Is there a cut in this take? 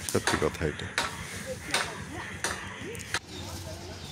yes; 1 cut; at 3.2 s

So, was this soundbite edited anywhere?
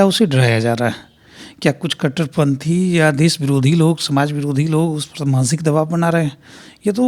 no; 0 cuts

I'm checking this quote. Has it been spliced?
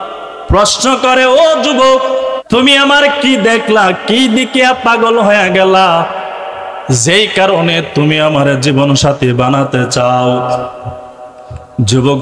yes; 1 cut; at 2.4 s

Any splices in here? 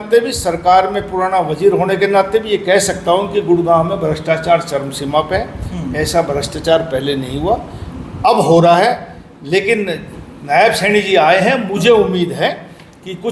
no; 0 cuts

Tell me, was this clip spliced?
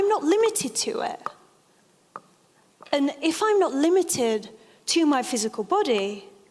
no; 0 cuts

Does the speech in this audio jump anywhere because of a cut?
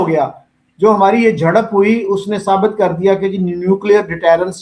no; 0 cuts

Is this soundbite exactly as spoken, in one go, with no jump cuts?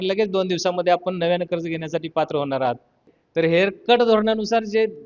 no; 1 cut; at 3.1 s

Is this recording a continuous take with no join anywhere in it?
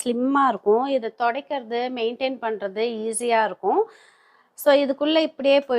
yes; 0 cuts

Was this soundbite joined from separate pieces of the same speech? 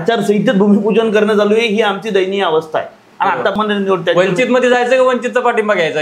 yes; 1 cut; at 3.5 s

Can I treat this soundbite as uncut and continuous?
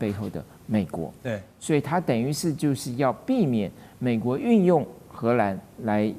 yes; 0 cuts

